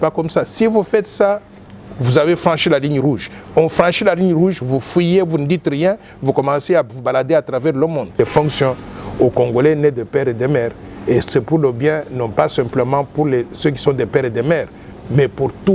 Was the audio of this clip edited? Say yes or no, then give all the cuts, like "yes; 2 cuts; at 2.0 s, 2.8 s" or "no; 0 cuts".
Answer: yes; 1 cut; at 8.2 s